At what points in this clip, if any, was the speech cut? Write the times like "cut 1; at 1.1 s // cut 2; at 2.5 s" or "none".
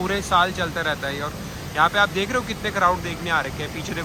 none